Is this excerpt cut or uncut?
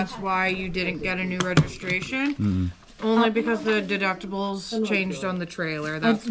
uncut